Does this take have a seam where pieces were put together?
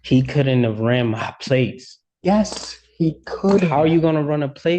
no; 0 cuts

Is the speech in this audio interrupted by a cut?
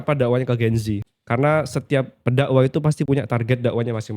yes; 1 cut; at 1.1 s

